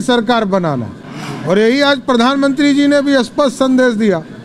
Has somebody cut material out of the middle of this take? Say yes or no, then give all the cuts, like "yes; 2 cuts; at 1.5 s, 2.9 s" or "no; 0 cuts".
no; 0 cuts